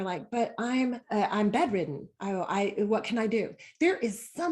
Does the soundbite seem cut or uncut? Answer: cut